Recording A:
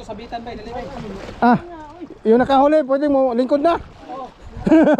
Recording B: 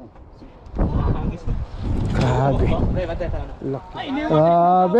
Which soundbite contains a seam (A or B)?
B